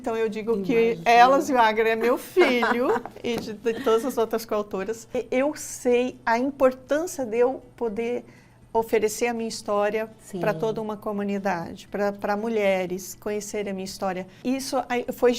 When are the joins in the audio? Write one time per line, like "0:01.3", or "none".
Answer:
0:05.1
0:14.4